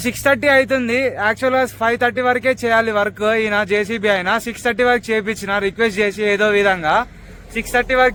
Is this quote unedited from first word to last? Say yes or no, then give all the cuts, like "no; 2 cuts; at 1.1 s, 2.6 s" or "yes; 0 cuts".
yes; 0 cuts